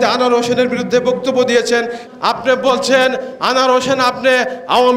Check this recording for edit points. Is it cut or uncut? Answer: cut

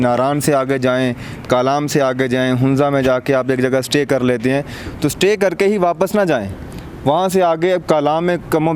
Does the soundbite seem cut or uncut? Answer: uncut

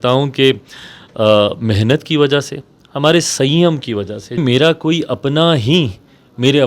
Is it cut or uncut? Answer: cut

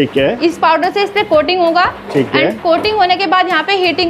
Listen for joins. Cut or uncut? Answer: uncut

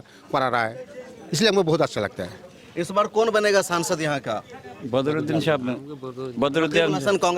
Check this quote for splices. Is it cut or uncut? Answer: uncut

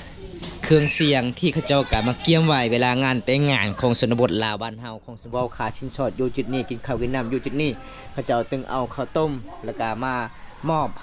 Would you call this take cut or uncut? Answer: cut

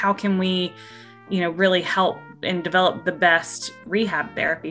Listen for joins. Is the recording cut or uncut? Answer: cut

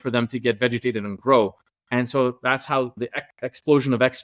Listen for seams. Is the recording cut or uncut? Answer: uncut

